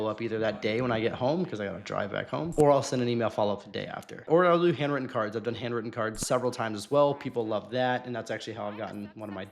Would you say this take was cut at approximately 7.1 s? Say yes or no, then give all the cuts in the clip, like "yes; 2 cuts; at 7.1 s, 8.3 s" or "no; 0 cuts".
no; 2 cuts; at 2.5 s, 4.2 s